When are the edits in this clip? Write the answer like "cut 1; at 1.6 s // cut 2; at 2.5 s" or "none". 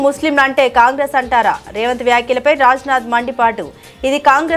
none